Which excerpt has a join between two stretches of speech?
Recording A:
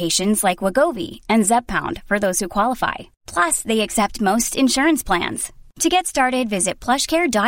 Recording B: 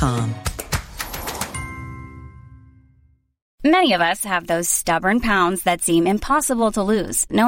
B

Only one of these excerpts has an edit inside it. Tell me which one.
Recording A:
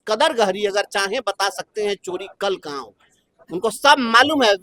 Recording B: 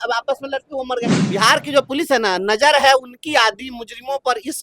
B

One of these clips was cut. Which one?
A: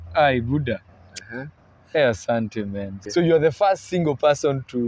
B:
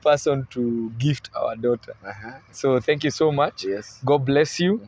A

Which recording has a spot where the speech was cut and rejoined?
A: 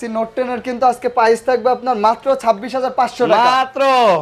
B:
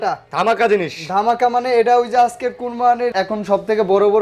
B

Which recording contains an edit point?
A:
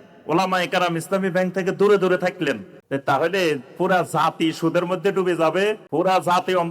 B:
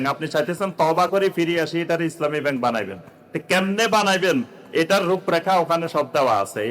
A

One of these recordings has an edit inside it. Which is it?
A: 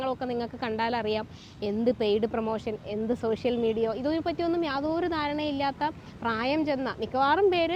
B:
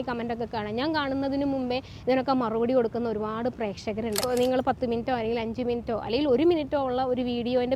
B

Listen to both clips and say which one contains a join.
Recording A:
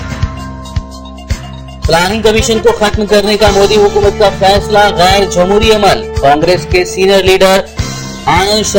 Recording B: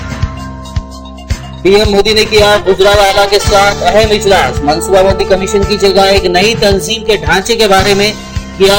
A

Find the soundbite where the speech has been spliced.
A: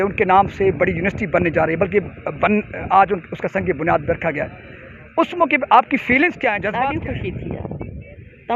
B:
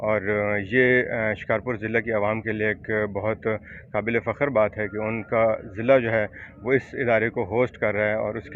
A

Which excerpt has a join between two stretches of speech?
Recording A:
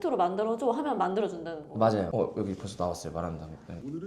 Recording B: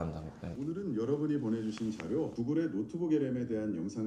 A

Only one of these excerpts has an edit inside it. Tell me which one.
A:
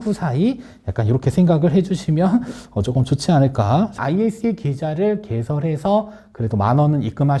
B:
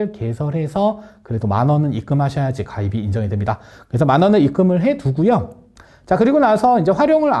A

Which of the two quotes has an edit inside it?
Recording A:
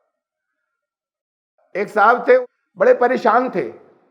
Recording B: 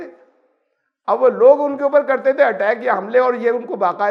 A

